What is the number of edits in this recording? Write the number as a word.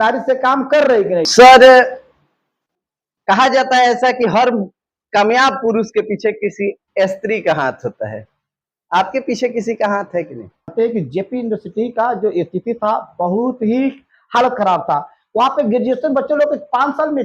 two